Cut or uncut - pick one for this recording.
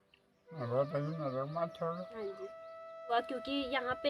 cut